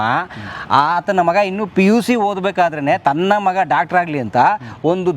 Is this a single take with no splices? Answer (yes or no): yes